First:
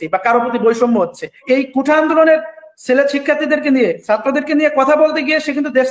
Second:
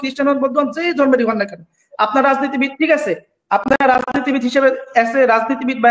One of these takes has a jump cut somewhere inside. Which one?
first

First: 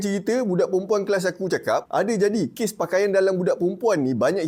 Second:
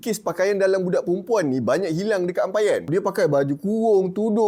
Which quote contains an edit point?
second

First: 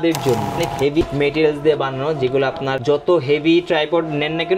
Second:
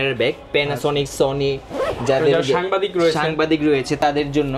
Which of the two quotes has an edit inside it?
first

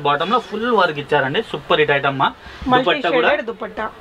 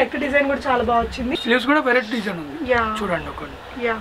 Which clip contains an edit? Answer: second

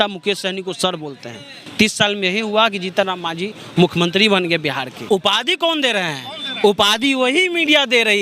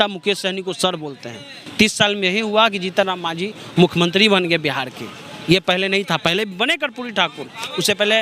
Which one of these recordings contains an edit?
first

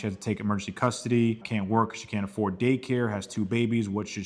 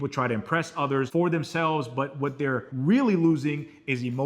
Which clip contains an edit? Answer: second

